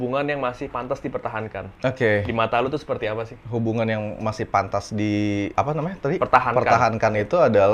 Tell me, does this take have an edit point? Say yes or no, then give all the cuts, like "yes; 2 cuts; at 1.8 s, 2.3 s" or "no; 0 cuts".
no; 0 cuts